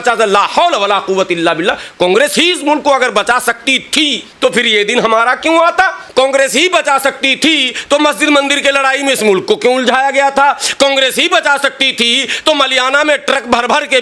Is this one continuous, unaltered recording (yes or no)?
no